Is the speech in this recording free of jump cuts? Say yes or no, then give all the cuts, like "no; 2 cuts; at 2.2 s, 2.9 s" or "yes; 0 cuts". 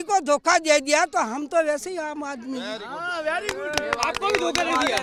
yes; 0 cuts